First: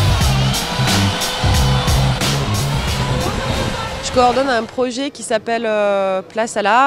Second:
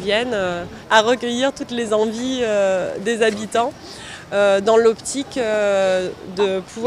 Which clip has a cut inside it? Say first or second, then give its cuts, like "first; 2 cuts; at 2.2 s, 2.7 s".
second; 1 cut; at 1.0 s